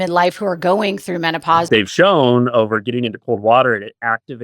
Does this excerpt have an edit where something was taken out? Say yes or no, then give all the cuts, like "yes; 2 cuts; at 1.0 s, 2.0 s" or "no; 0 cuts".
yes; 1 cut; at 1.7 s